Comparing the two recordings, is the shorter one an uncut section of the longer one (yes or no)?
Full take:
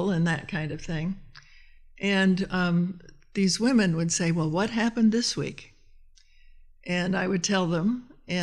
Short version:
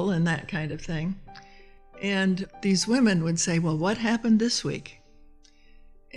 no